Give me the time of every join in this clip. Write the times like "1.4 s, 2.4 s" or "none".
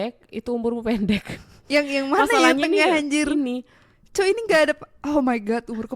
none